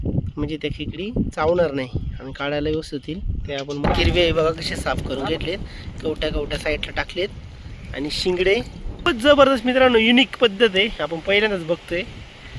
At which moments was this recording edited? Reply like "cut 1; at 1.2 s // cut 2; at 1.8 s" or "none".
cut 1; at 3.8 s // cut 2; at 9.1 s

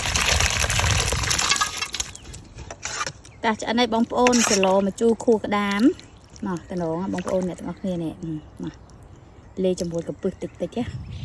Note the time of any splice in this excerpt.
cut 1; at 2.6 s

